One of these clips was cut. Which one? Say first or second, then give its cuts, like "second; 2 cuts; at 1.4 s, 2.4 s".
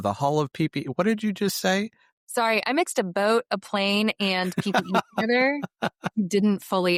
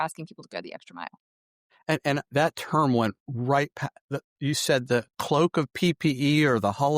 second; 1 cut; at 2.3 s